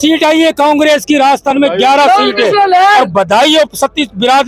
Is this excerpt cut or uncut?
uncut